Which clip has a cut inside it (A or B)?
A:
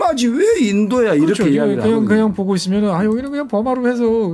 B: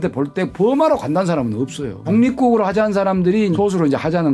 B